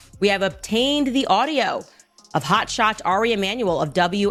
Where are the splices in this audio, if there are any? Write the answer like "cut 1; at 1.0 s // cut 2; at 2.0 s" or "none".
none